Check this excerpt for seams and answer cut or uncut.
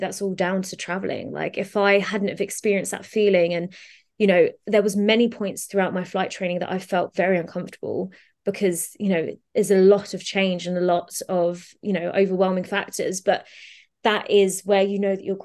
uncut